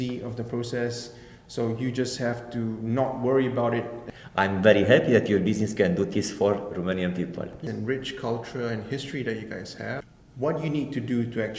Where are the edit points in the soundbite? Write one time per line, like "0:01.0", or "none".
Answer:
0:04.0
0:07.6
0:10.1